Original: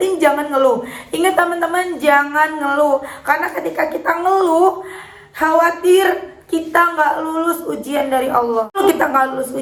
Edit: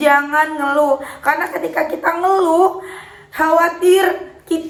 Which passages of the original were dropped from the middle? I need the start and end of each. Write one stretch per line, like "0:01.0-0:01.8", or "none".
none